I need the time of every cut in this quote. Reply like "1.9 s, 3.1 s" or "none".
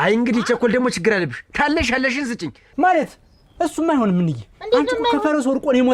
2.6 s